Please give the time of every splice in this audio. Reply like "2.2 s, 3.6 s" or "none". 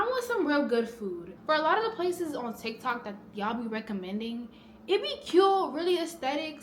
1.3 s